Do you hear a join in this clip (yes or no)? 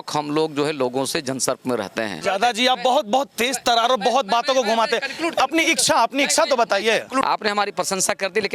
yes